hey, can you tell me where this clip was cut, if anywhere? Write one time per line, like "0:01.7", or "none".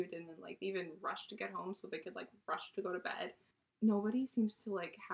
0:03.6